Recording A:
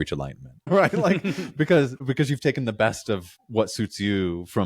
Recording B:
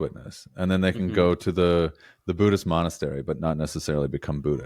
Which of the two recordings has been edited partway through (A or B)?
A